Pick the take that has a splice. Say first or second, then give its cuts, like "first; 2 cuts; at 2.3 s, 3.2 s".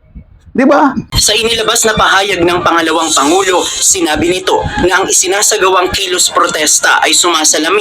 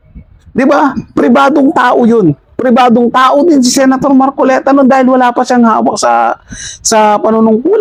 first; 1 cut; at 1.0 s